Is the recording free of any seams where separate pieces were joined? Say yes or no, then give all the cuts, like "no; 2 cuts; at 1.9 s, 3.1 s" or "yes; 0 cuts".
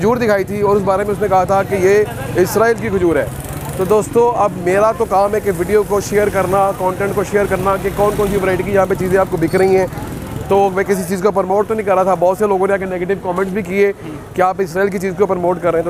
yes; 0 cuts